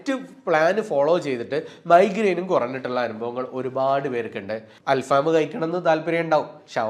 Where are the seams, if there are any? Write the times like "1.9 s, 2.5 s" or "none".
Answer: 4.7 s